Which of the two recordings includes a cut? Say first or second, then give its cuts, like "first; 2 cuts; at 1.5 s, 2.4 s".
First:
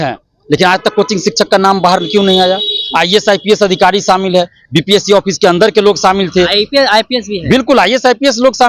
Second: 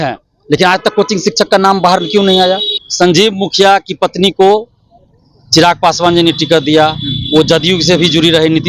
second; 1 cut; at 2.8 s